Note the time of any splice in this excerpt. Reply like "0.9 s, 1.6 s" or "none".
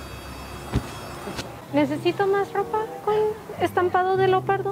1.6 s